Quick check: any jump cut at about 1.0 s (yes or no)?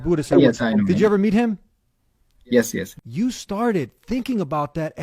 no